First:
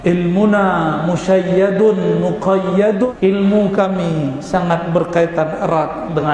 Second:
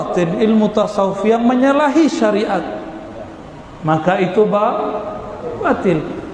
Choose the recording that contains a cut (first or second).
first